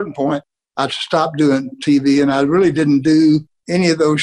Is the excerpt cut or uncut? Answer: uncut